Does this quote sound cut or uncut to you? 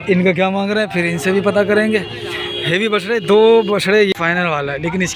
cut